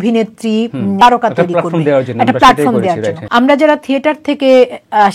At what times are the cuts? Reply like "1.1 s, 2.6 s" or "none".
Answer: 1.0 s, 3.2 s

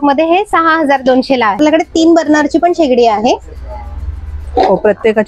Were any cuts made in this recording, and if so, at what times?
1.6 s

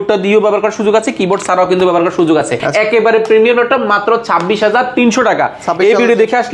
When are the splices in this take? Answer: none

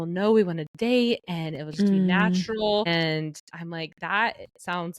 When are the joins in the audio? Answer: 2.9 s

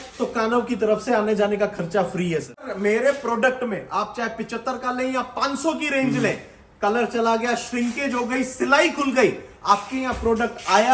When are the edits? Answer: 2.6 s

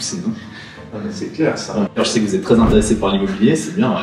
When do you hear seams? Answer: 1.9 s

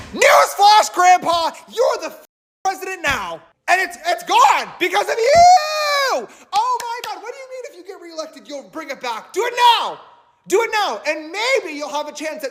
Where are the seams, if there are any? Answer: none

